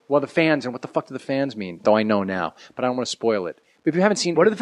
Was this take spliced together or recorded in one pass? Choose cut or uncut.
cut